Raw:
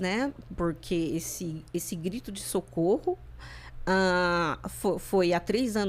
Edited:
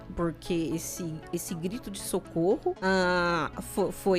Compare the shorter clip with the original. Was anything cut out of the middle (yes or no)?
yes